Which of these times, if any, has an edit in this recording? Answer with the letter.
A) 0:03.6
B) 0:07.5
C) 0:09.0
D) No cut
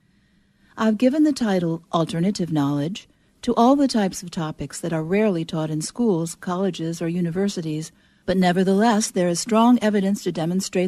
A